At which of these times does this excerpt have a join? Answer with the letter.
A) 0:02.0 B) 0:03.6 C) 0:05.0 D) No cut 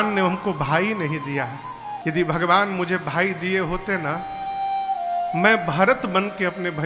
A